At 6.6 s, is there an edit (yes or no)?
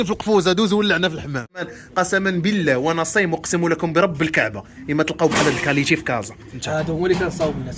yes